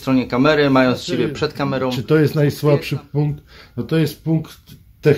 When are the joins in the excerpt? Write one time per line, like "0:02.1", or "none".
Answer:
0:01.9

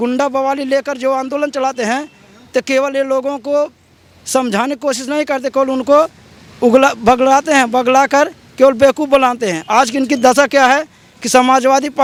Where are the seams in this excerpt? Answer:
none

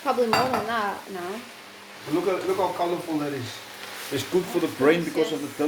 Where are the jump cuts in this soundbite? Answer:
none

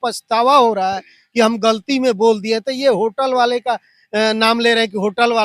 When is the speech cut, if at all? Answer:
none

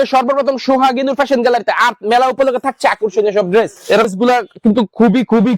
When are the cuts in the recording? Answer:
0:04.1

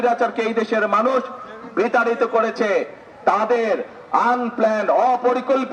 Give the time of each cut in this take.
none

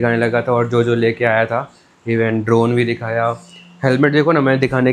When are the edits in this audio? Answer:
none

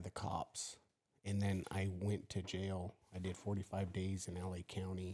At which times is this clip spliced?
none

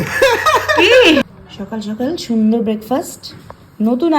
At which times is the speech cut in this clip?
0:01.3

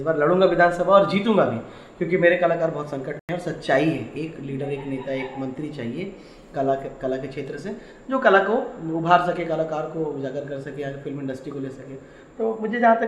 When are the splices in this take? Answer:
none

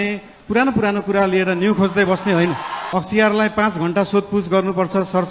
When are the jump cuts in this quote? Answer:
0:02.7

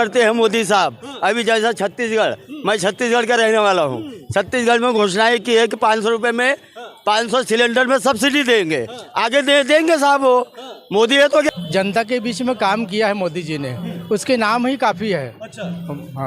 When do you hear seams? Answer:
0:11.5

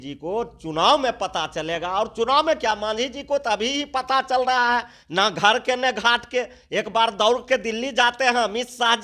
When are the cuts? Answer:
none

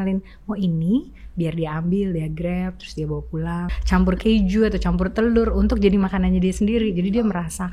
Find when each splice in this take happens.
0:03.7

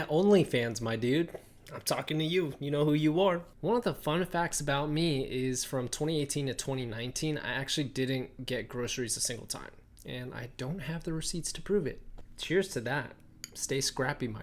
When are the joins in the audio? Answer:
0:03.3

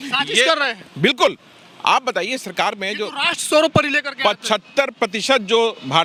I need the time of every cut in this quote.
none

